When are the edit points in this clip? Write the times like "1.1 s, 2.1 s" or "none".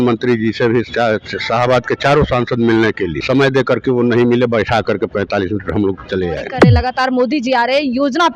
3.2 s, 6.5 s